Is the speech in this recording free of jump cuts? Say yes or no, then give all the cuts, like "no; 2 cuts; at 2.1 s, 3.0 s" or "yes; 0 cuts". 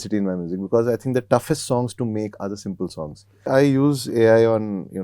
no; 1 cut; at 3.5 s